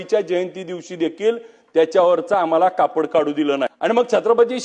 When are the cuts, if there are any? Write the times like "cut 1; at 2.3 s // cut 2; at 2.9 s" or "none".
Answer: cut 1; at 3.7 s

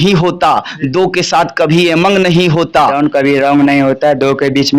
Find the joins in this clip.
cut 1; at 2.9 s

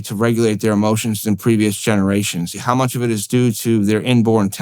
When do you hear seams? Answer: cut 1; at 2.6 s

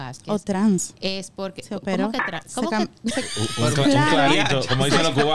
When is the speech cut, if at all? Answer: none

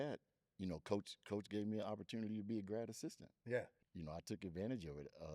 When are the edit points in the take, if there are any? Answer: cut 1; at 3.8 s

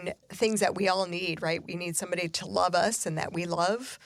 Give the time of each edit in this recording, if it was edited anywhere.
none

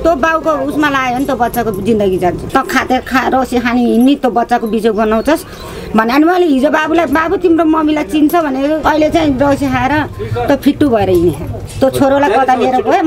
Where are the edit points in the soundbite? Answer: cut 1; at 2.4 s // cut 2; at 8.8 s

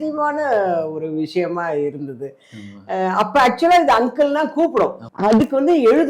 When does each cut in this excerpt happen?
cut 1; at 5.1 s

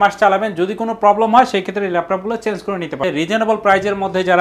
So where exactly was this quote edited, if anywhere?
cut 1; at 3.0 s

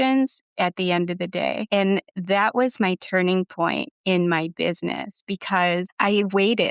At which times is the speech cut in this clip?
none

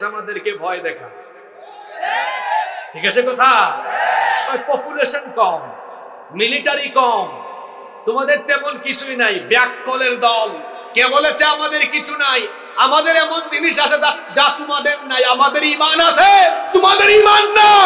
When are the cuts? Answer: none

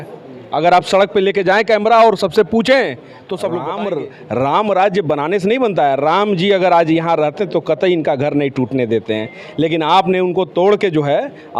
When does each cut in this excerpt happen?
cut 1; at 3.6 s

